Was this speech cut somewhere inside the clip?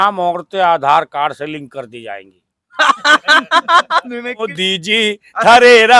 yes; 1 cut; at 4.6 s

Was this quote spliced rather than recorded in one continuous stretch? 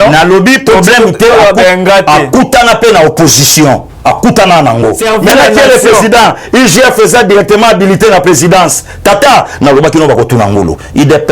yes; 1 cut; at 5.0 s

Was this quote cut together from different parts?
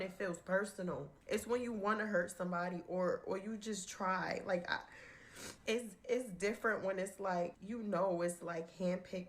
no; 0 cuts

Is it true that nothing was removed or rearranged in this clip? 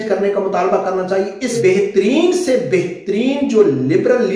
no; 1 cut; at 1.5 s

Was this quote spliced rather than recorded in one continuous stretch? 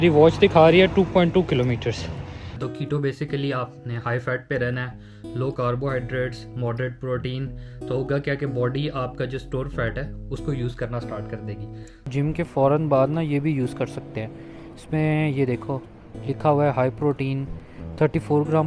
yes; 2 cuts; at 2.6 s, 12.0 s

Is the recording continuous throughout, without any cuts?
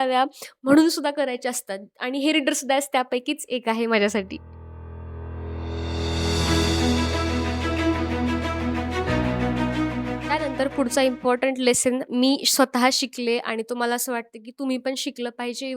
yes; 0 cuts

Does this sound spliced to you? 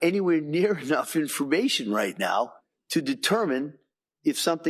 no; 0 cuts

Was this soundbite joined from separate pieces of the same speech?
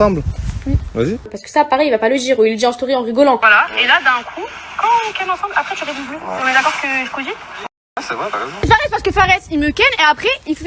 yes; 3 cuts; at 1.4 s, 3.4 s, 8.6 s

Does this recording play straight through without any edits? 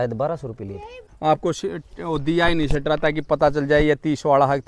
no; 1 cut; at 1.1 s

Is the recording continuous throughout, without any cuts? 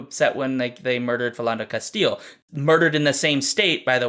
no; 1 cut; at 2.4 s

